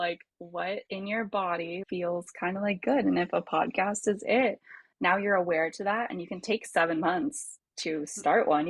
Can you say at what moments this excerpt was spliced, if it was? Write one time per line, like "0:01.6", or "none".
0:00.9
0:01.8